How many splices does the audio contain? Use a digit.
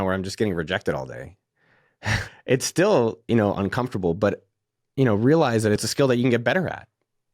2